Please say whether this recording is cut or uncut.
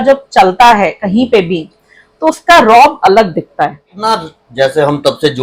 cut